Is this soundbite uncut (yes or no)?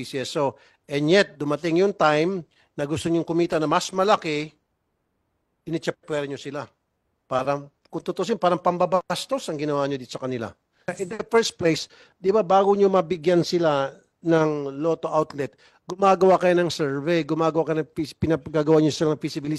no